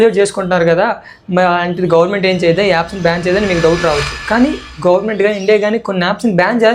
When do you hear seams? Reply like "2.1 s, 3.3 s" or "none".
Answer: none